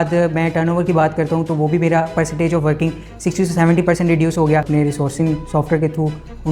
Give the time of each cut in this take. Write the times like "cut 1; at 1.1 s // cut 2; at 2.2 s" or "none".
cut 1; at 4.7 s

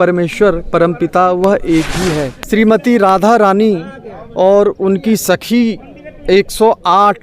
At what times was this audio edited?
cut 1; at 2.3 s

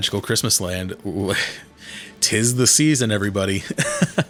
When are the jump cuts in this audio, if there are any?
none

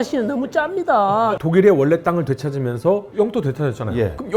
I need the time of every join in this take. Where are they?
cut 1; at 1.3 s // cut 2; at 3.1 s

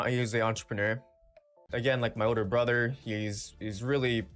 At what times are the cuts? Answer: cut 1; at 1.6 s

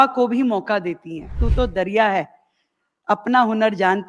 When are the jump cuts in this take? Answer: cut 1; at 1.4 s

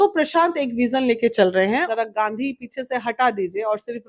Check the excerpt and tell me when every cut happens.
cut 1; at 1.9 s

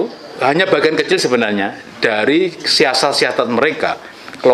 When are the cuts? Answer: none

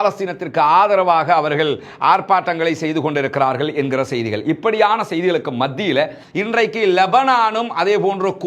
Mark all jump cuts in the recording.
cut 1; at 6.2 s

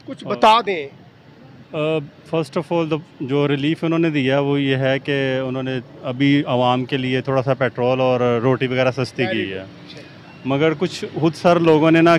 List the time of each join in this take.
none

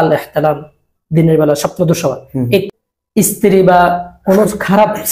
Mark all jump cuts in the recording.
cut 1; at 2.7 s

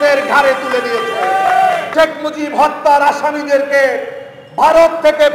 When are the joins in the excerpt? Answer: cut 1; at 1.9 s

